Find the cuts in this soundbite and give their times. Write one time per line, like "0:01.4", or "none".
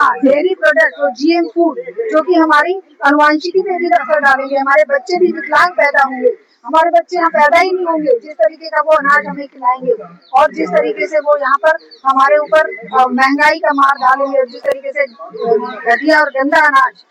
none